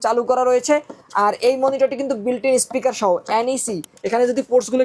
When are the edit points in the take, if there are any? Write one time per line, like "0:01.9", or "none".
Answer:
0:03.9